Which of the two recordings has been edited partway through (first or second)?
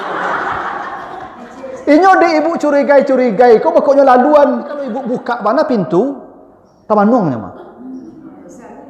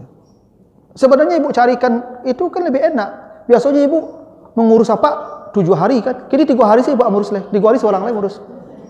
first